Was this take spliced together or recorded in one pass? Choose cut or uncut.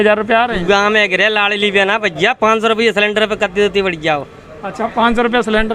uncut